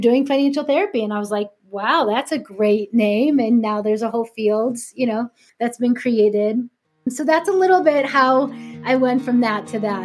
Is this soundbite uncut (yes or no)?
yes